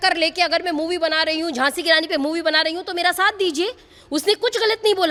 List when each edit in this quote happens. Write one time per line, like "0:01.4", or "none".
none